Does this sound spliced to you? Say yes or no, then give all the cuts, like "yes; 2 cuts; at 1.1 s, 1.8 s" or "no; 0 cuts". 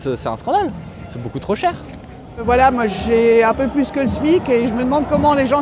yes; 1 cut; at 2.4 s